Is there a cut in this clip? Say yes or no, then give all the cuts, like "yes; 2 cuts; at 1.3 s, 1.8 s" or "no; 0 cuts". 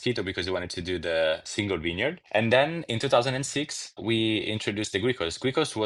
no; 0 cuts